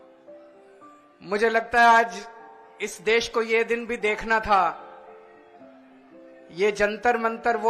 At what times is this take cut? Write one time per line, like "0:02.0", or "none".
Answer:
0:01.2